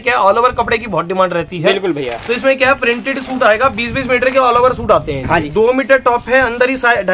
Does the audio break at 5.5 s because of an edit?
yes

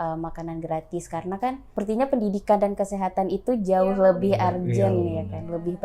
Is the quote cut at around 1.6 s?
yes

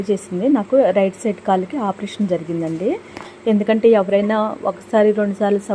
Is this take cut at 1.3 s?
no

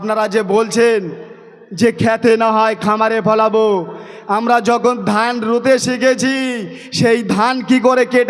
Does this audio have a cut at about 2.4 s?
no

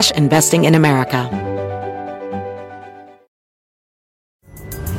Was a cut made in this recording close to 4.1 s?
no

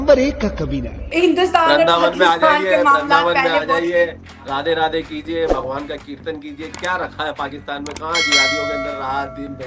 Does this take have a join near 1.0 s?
yes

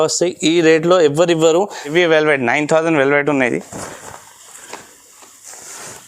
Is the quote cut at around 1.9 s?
yes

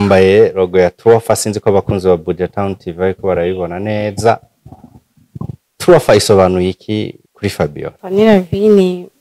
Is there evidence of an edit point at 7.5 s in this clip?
yes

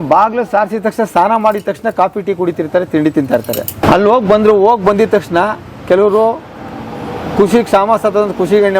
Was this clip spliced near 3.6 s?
no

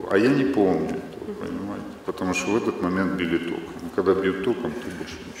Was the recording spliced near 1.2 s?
no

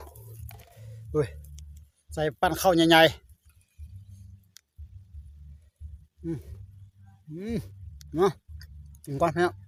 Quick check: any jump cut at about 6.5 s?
no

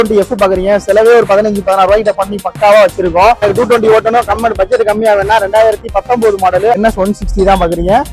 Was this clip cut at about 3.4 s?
yes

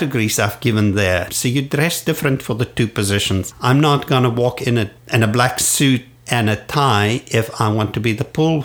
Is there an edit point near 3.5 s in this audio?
no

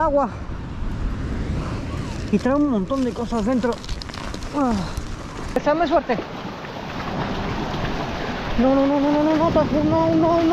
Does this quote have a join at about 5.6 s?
yes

